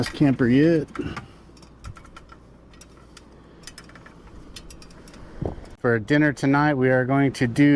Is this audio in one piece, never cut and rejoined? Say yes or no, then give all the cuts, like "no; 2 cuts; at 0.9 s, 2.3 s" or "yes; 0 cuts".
no; 1 cut; at 5.7 s